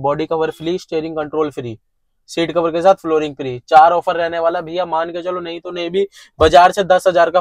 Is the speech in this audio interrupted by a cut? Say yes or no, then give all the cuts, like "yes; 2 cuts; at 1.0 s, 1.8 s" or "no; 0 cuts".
no; 0 cuts